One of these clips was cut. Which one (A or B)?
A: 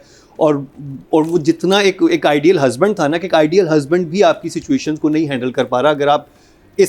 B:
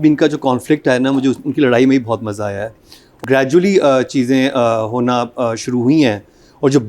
B